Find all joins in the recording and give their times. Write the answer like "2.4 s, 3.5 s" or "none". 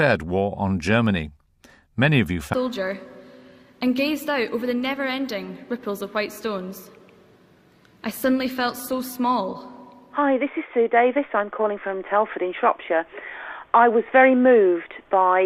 none